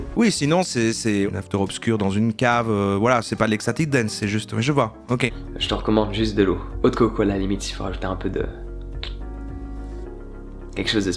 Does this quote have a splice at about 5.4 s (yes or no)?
yes